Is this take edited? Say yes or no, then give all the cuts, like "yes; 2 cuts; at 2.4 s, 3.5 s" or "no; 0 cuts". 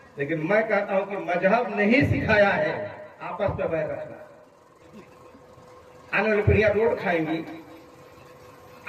yes; 1 cut; at 4.8 s